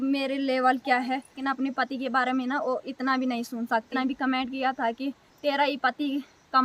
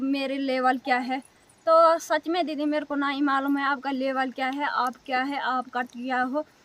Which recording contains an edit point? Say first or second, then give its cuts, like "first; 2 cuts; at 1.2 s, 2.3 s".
first; 2 cuts; at 1.4 s, 3.9 s